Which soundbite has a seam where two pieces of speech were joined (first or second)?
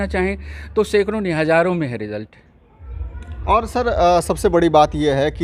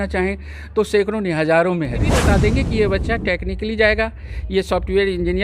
second